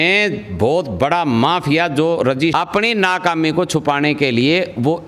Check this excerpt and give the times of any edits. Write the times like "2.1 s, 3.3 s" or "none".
2.5 s